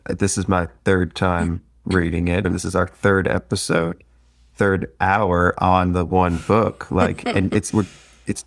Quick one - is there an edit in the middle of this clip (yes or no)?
yes